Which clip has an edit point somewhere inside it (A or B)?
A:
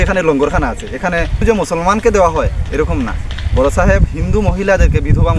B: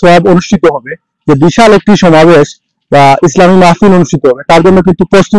A